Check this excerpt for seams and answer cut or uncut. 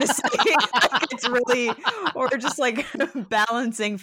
uncut